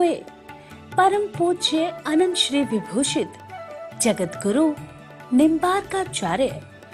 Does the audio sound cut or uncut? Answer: cut